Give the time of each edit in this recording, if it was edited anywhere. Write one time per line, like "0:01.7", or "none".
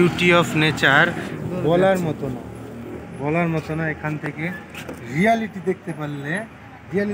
none